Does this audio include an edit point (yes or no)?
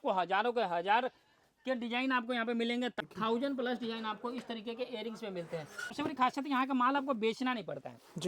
yes